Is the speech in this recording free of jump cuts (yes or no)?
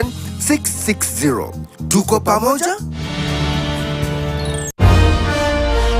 no